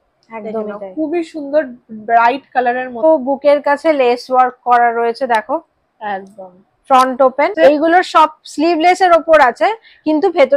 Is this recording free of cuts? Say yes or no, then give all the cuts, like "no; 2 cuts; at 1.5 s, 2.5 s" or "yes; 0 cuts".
no; 2 cuts; at 3.0 s, 7.5 s